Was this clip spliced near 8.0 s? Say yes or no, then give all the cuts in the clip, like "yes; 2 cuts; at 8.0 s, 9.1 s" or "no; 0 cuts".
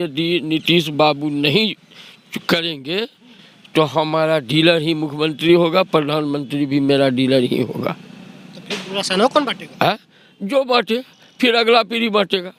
no; 0 cuts